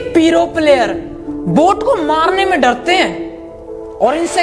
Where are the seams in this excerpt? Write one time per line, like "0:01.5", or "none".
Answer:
none